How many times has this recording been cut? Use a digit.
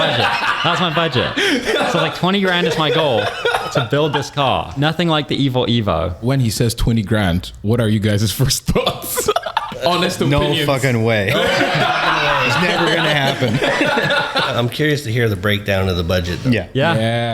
4